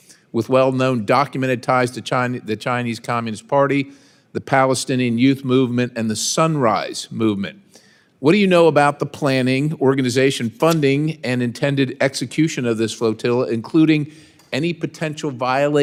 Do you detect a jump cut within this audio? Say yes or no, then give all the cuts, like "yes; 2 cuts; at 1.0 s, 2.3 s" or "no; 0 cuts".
no; 0 cuts